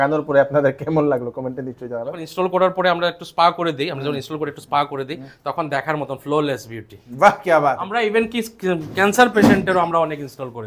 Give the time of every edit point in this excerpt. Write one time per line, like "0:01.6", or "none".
0:02.3
0:07.9